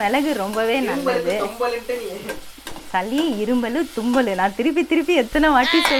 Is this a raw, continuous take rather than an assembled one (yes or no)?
yes